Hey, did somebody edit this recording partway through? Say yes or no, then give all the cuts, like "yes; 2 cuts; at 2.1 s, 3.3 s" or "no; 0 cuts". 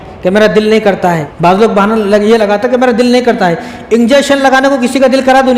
yes; 1 cut; at 1.3 s